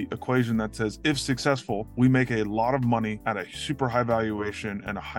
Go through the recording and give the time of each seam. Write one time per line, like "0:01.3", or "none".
0:01.9
0:03.2